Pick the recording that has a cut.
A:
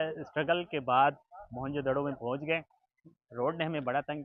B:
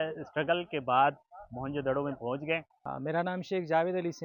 B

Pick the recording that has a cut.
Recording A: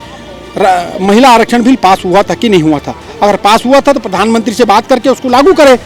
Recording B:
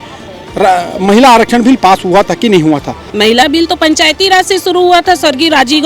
B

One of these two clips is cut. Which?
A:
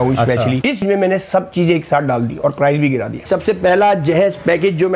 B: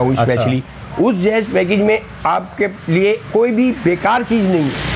A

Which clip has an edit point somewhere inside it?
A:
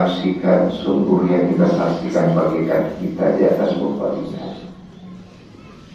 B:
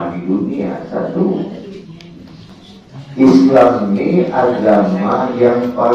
B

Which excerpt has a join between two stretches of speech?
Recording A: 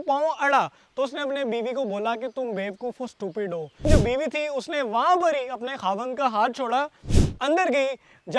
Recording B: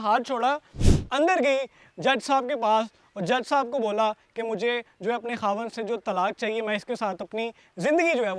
A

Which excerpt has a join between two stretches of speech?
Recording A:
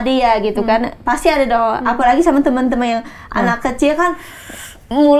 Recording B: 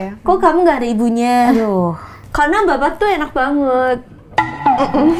B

